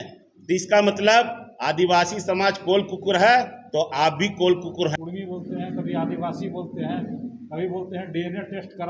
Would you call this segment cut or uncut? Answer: cut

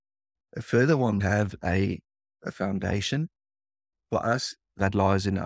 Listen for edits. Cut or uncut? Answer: cut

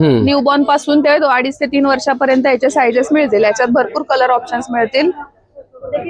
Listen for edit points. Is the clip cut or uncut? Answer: uncut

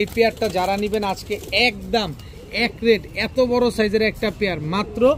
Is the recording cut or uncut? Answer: uncut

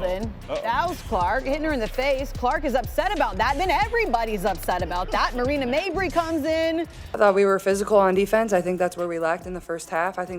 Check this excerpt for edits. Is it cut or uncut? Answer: cut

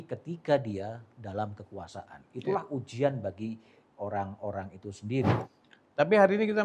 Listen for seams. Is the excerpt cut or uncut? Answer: cut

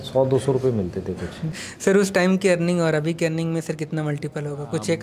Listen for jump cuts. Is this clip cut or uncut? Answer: cut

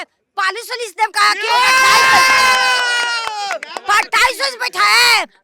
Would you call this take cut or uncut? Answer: uncut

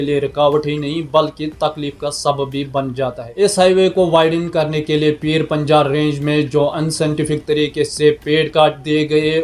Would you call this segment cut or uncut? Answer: cut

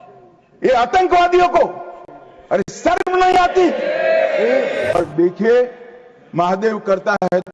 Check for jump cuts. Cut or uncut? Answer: cut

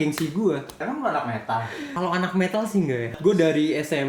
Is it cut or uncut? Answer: cut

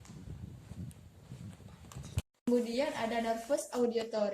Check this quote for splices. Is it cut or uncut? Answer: cut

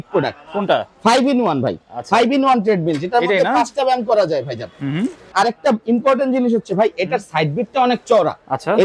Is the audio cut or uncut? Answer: cut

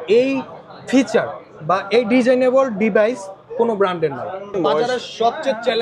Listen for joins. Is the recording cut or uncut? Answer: cut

